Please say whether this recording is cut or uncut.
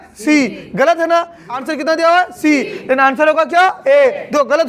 cut